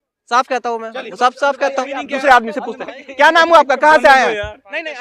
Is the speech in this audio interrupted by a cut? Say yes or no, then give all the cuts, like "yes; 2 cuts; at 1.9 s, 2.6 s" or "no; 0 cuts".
no; 0 cuts